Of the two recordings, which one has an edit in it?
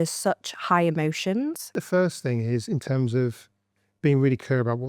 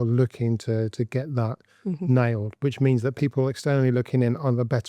first; 1 cut; at 1.8 s

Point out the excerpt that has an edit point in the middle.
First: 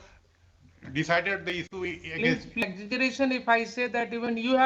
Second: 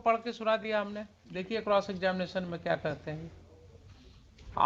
first; 1 cut; at 2.6 s

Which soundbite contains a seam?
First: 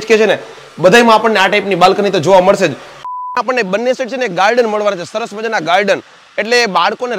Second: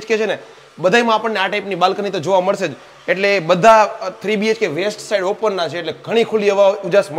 first; 1 cut; at 3.1 s

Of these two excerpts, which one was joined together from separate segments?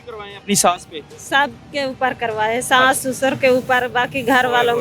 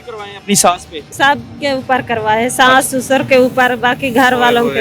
second; 1 cut; at 1.0 s

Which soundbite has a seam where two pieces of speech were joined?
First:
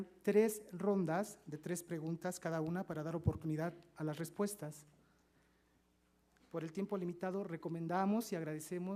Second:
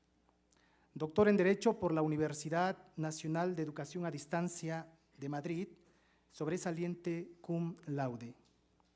second; 1 cut; at 7.8 s

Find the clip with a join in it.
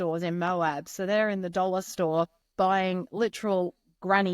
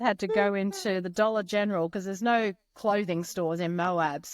first; 1 cut; at 2.4 s

